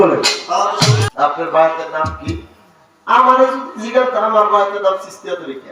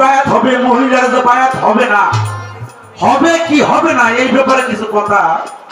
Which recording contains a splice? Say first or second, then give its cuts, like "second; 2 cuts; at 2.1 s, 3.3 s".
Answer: first; 1 cut; at 1.1 s